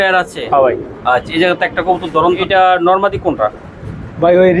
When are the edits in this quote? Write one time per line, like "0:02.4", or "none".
0:02.4